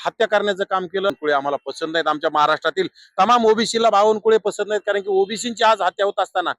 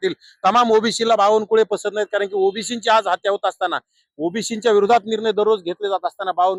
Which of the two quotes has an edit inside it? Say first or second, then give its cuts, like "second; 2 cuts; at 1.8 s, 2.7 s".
first; 1 cut; at 1.1 s